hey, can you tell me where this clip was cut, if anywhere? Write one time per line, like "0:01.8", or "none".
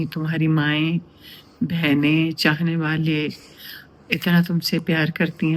none